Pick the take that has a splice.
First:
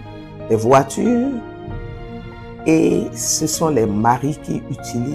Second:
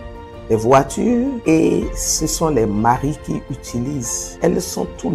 second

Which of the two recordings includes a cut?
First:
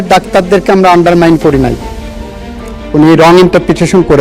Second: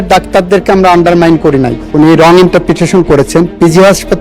second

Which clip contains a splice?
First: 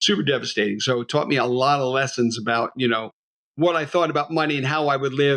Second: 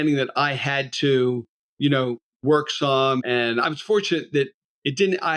second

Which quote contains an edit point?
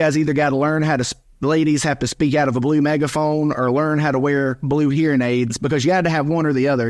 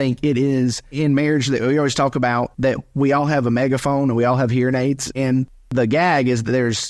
second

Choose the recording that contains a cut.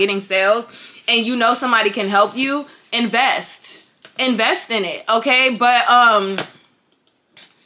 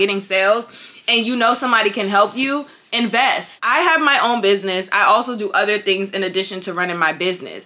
second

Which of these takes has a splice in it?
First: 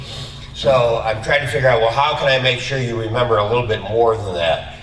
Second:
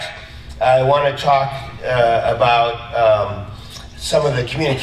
second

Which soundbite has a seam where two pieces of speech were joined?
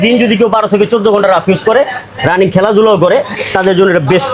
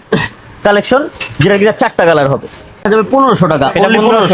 second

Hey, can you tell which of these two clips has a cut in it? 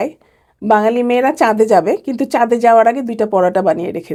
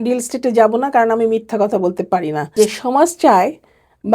second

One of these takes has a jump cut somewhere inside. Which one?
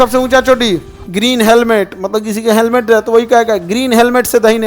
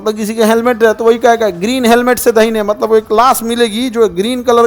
first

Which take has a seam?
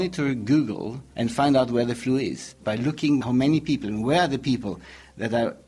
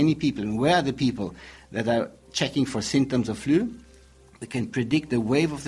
first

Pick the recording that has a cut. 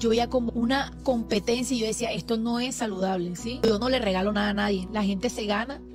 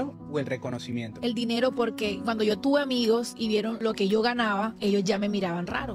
first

